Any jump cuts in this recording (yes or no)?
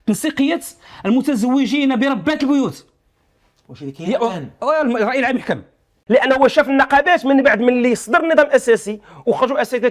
yes